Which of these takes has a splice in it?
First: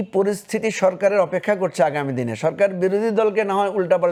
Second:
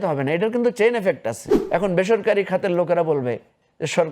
second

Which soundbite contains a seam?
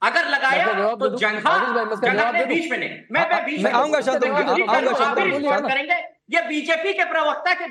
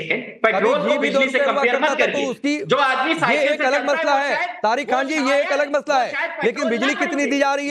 second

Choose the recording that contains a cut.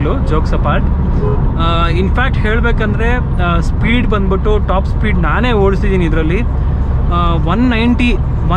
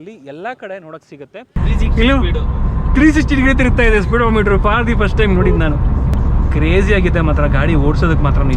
second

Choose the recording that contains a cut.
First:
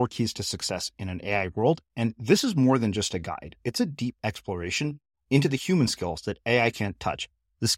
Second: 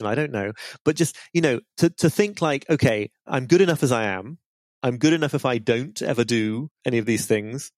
second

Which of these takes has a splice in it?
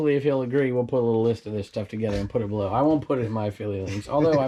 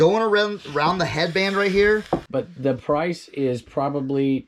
second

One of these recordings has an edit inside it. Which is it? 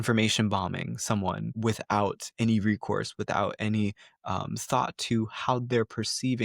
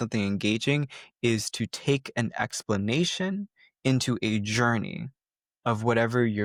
first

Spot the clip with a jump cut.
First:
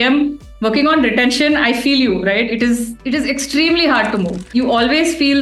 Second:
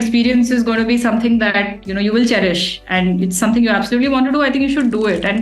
first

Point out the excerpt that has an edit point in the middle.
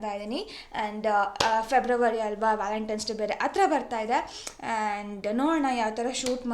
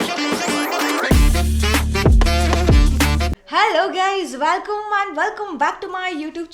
second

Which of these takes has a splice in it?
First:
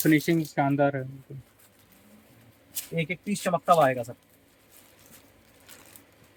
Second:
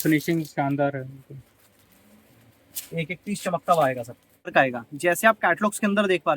second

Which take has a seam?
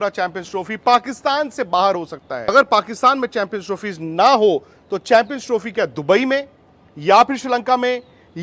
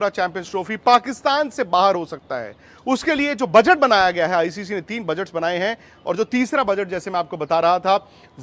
first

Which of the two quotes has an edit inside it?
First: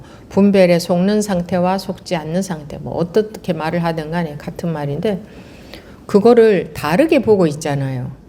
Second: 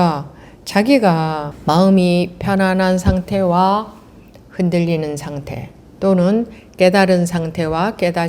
second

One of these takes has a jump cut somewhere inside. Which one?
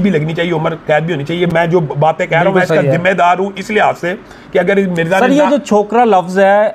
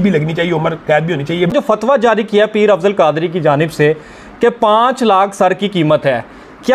second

